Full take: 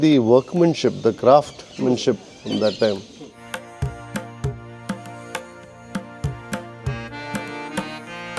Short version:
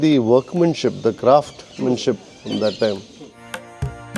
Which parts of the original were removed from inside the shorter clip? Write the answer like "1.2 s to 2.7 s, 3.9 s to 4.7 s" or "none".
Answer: none